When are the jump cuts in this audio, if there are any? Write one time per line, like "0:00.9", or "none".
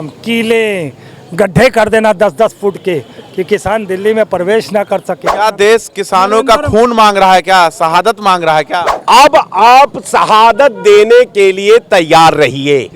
0:05.3
0:08.8

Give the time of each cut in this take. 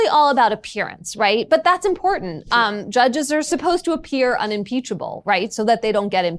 0:03.5

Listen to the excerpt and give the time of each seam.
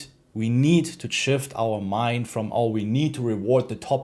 none

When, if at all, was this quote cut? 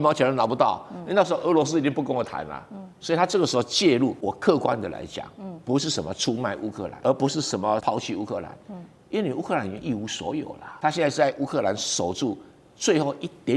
0:04.2
0:06.9
0:07.8
0:10.6

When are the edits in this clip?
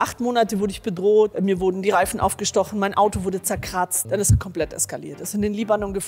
0:01.3
0:04.0

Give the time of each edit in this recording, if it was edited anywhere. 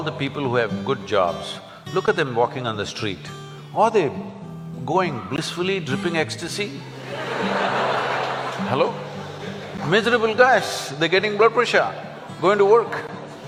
none

